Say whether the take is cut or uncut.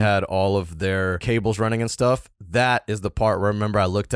cut